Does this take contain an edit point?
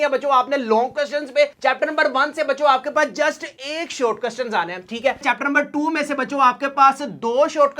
yes; 1 cut; at 5.2 s

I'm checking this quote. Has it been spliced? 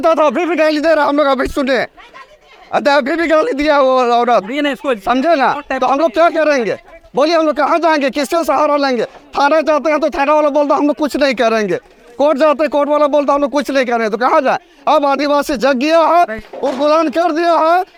no; 0 cuts

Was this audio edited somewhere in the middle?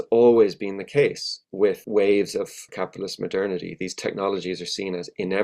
yes; 2 cuts; at 1.8 s, 2.7 s

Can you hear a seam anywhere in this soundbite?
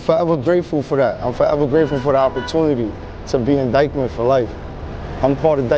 no; 0 cuts

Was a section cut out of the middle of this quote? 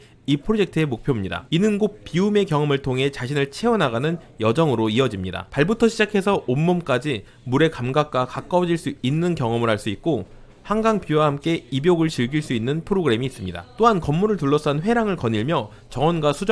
no; 0 cuts

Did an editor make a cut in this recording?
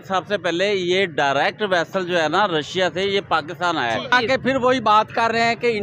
yes; 1 cut; at 4.1 s

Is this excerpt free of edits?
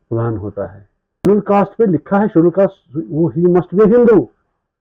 no; 1 cut; at 1.2 s

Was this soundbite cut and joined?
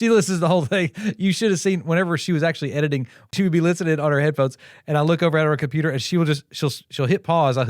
yes; 1 cut; at 3.3 s

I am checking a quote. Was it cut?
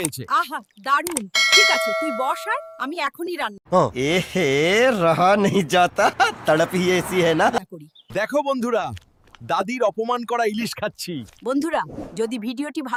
no; 0 cuts

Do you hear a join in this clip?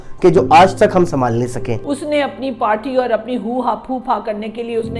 yes; 1 cut; at 1.7 s

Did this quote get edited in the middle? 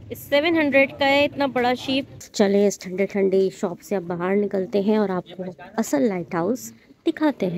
yes; 1 cut; at 2.2 s

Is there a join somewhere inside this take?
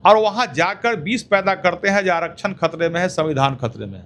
no; 0 cuts

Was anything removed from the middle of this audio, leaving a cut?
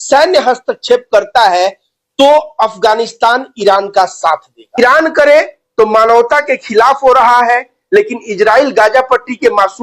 yes; 1 cut; at 4.6 s

